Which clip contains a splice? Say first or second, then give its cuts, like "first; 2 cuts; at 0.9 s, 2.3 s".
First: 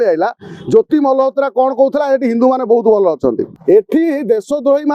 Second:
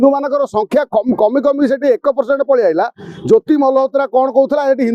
first; 1 cut; at 3.5 s